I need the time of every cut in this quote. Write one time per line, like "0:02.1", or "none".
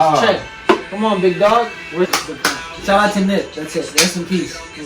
0:02.1